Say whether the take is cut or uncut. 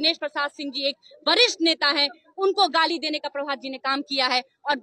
uncut